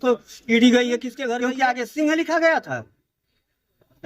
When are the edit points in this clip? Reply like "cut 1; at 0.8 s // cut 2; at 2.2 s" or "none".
cut 1; at 1.2 s